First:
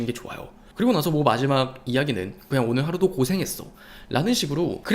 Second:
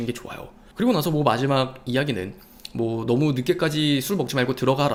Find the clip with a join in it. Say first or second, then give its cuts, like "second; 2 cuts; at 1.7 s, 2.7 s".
first; 1 cut; at 2.5 s